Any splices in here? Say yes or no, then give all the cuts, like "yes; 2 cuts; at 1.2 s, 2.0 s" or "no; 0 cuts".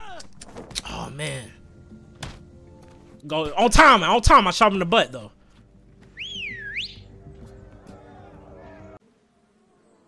no; 0 cuts